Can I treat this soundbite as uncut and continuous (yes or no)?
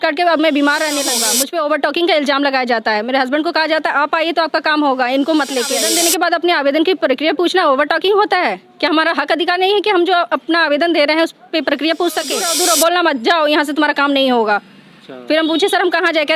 no